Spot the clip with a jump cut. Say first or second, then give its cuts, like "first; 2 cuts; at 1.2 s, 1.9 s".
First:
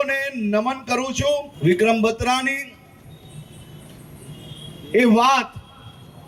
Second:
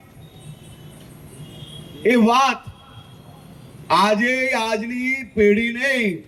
first; 1 cut; at 1.5 s